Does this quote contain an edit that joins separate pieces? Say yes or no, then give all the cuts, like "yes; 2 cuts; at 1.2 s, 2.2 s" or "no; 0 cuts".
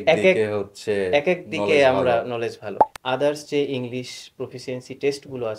yes; 1 cut; at 2.8 s